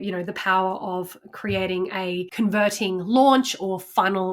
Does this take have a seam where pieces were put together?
yes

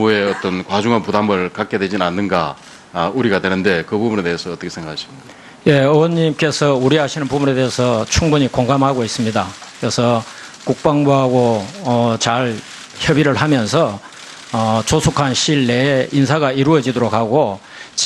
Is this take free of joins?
yes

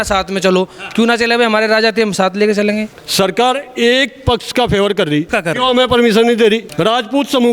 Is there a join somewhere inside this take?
yes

